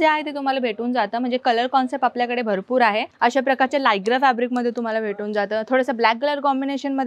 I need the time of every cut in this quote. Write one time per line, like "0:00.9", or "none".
0:03.1